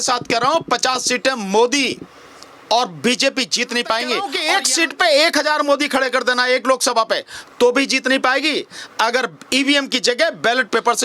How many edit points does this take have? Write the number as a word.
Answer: one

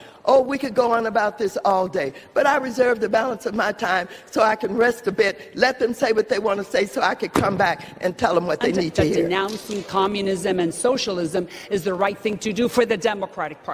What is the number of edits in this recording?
one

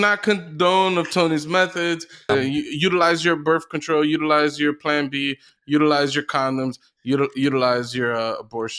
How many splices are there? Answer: one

